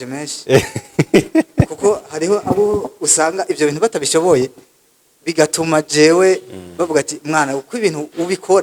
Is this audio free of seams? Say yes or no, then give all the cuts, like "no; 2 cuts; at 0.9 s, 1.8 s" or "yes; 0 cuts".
yes; 0 cuts